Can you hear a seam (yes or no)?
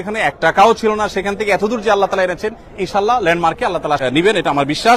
yes